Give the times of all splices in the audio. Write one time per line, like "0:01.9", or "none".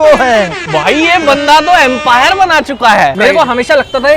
0:03.1